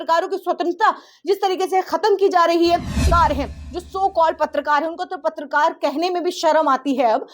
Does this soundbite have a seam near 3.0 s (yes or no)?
yes